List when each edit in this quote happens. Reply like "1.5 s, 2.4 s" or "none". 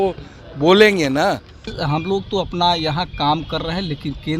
1.8 s